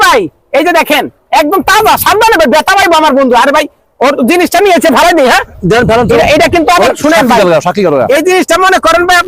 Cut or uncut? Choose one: uncut